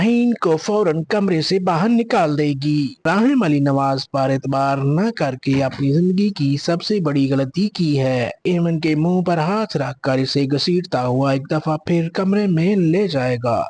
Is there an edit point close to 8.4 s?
yes; 2 cuts; at 3.0 s, 8.4 s

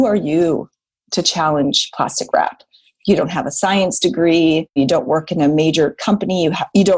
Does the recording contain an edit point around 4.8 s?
yes; 1 cut; at 4.8 s

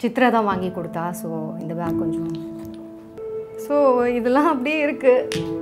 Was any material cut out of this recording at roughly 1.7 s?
no; 1 cut; at 3.2 s

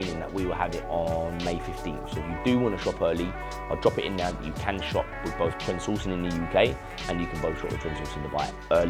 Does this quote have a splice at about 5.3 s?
no; 0 cuts

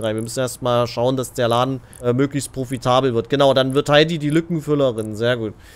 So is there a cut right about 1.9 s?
yes; 1 cut; at 1.9 s

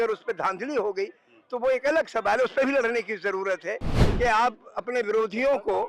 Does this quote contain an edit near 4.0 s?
yes; 1 cut; at 4.0 s

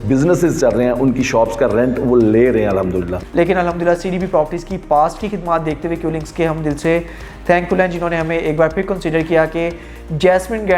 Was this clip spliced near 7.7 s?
no; 1 cut; at 3.1 s

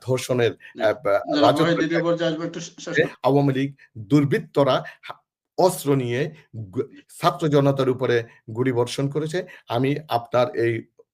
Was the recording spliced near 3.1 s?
yes; 1 cut; at 3.1 s

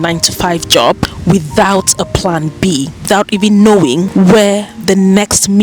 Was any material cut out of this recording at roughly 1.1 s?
yes; 3 cuts; at 1.1 s, 3.1 s, 4.1 s

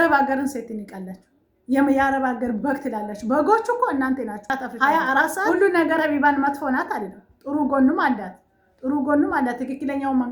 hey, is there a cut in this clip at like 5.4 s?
yes; 1 cut; at 5.4 s

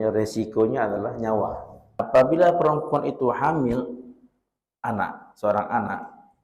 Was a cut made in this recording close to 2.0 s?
yes; 1 cut; at 2.0 s

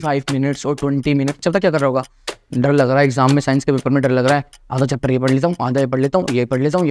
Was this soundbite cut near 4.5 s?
no; 1 cut; at 1.4 s

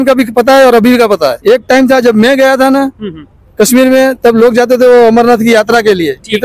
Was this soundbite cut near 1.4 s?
yes; 1 cut; at 1.4 s

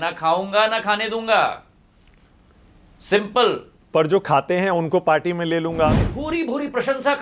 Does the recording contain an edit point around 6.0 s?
yes; 1 cut; at 6.0 s

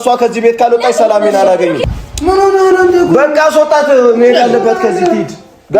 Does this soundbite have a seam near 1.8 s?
yes; 1 cut; at 1.8 s

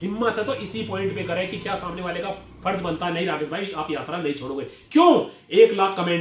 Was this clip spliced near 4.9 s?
no; 0 cuts

